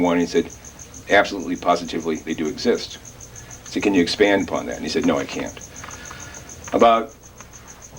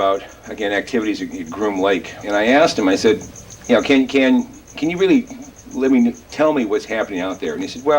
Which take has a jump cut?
second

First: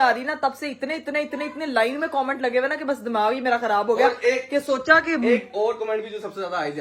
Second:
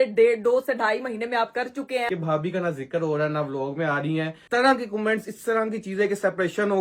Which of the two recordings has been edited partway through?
second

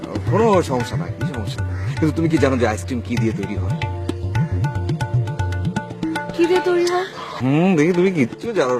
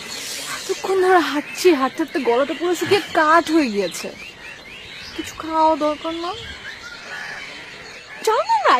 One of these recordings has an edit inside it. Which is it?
first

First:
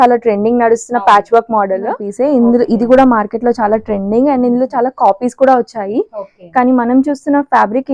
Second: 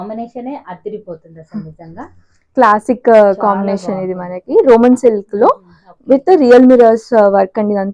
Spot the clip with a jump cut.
first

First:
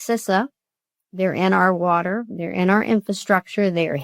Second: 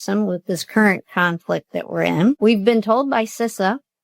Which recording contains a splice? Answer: second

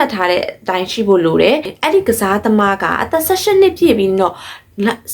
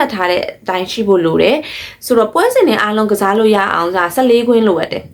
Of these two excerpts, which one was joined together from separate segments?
first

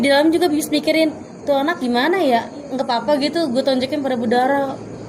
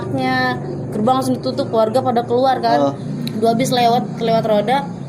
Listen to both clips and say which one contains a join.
second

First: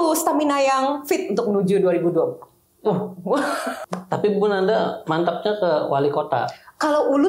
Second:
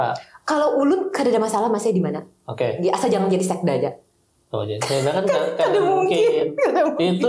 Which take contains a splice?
first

